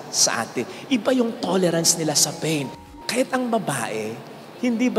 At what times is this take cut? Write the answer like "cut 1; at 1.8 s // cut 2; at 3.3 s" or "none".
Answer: cut 1; at 2.8 s